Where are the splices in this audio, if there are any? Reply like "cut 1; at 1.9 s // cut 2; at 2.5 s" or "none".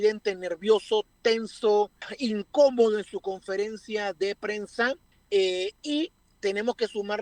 cut 1; at 2.0 s // cut 2; at 5.1 s // cut 3; at 6.2 s